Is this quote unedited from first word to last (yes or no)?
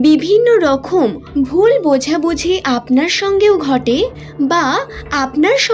no